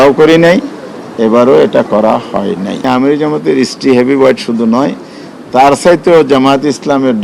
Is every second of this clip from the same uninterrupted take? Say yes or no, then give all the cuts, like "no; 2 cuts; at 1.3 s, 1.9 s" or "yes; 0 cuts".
no; 1 cut; at 2.8 s